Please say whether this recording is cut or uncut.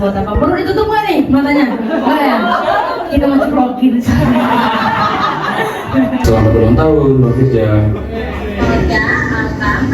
cut